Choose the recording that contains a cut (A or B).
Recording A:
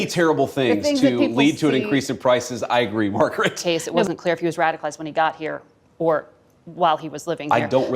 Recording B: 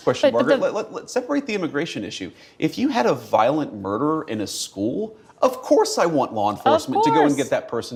A